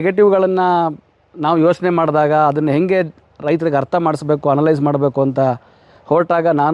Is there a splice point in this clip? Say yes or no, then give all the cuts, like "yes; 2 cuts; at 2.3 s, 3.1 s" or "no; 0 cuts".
no; 0 cuts